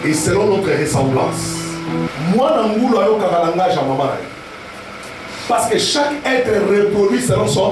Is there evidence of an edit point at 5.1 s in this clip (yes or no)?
no